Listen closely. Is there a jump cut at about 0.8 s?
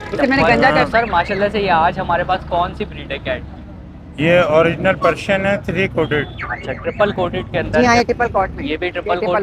yes; 2 cuts; at 0.8 s, 7.8 s

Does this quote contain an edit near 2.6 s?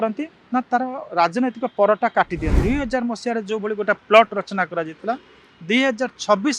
yes; 1 cut; at 2.6 s

